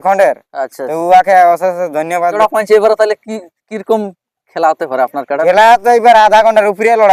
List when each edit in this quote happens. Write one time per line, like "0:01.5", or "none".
0:02.3

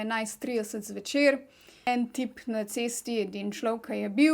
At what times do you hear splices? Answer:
0:01.9

